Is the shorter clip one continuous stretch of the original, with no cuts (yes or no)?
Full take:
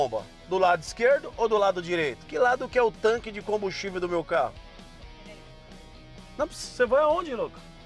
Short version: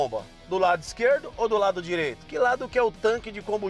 yes